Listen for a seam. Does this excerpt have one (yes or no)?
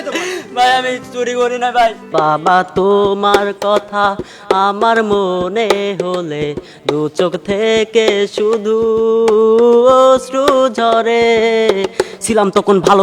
yes